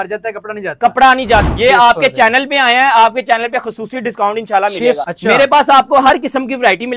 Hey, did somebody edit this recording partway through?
yes; 2 cuts; at 1.4 s, 5.0 s

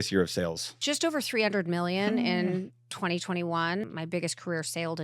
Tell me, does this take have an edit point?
yes; 1 cut; at 3.8 s

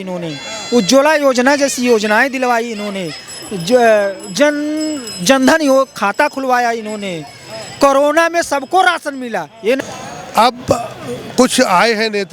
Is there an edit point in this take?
yes; 1 cut; at 9.8 s

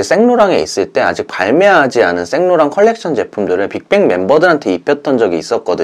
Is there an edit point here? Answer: no; 0 cuts

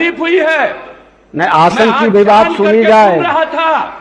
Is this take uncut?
yes; 0 cuts

